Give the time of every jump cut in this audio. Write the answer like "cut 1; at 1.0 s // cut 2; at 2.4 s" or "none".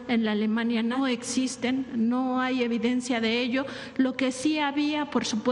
cut 1; at 1.0 s

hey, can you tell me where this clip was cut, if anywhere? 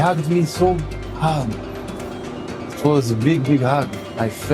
none

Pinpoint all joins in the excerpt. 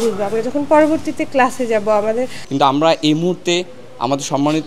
cut 1; at 2.4 s

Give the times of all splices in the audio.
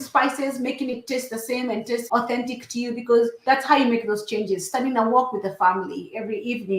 cut 1; at 2.0 s // cut 2; at 3.4 s

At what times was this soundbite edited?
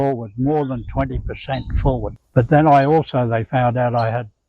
cut 1; at 2.2 s

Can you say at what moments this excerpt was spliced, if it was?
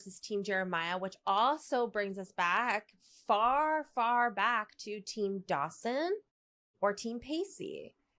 none

